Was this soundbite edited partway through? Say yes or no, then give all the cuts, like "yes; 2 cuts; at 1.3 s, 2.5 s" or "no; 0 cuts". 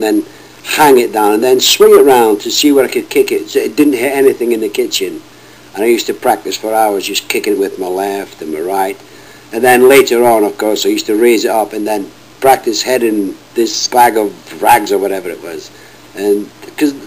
yes; 1 cut; at 15.0 s